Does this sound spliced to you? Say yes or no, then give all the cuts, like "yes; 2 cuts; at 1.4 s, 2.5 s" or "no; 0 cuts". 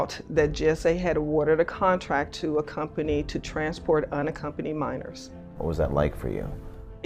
yes; 1 cut; at 5.6 s